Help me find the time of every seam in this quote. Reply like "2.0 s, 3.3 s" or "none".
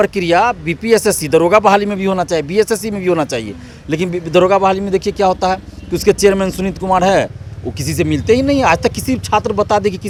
none